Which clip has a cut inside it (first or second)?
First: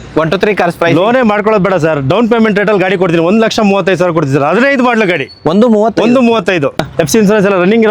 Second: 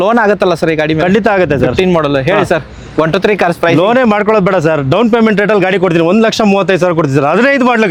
first